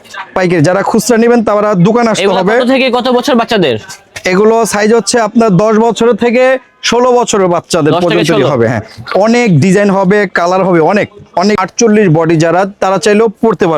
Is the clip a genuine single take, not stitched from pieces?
no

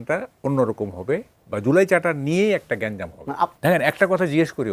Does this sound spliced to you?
yes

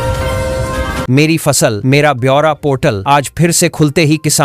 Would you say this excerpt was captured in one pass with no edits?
no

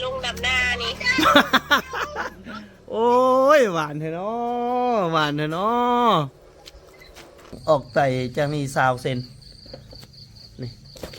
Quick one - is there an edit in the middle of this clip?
yes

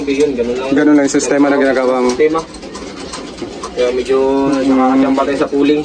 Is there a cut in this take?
no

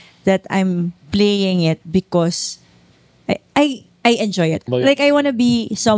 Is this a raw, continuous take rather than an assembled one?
no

